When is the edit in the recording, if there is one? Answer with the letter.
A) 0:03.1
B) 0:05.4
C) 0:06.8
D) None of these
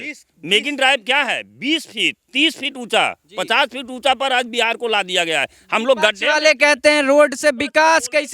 D